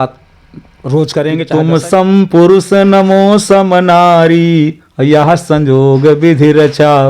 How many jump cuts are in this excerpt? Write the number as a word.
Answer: one